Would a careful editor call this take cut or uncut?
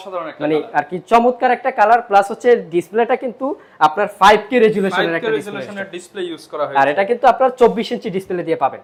uncut